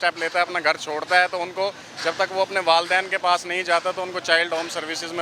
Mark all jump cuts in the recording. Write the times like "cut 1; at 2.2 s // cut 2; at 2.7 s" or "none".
none